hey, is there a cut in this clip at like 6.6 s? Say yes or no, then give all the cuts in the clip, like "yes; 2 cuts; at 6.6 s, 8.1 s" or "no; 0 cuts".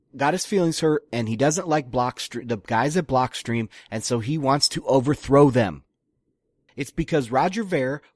yes; 1 cut; at 6.6 s